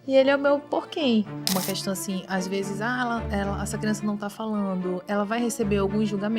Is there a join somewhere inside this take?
yes; 1 cut; at 1.3 s

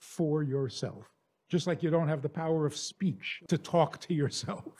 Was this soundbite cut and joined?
yes; 1 cut; at 3.3 s

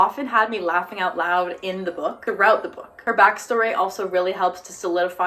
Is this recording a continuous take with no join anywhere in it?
yes; 0 cuts

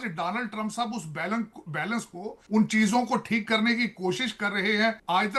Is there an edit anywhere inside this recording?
no; 0 cuts

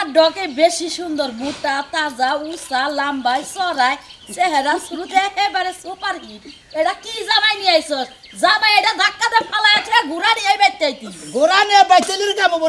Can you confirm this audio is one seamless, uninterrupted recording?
yes; 0 cuts

